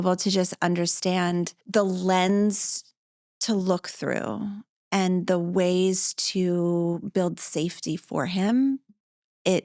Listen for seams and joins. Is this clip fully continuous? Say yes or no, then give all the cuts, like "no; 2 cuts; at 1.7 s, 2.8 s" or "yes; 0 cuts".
no; 1 cut; at 1.6 s